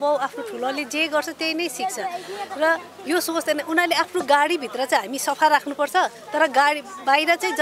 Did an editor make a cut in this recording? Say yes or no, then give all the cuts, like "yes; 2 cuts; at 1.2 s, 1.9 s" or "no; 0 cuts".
no; 0 cuts